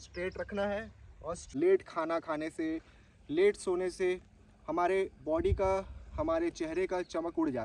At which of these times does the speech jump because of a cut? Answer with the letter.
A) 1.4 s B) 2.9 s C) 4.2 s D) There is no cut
A